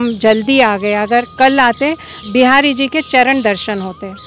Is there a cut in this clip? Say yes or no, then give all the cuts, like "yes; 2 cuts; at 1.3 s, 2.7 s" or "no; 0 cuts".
yes; 1 cut; at 2.2 s